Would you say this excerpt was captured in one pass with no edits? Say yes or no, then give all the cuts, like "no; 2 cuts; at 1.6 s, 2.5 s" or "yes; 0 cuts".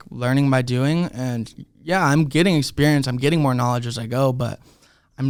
yes; 0 cuts